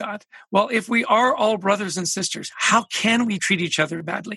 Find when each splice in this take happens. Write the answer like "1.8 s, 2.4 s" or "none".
3.4 s